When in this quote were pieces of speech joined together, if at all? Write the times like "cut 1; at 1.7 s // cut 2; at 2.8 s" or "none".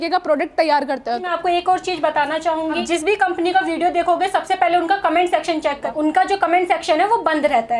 cut 1; at 1.3 s // cut 2; at 5.8 s